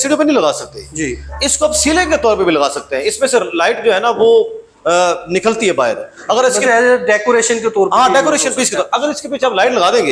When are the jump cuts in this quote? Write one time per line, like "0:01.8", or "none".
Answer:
none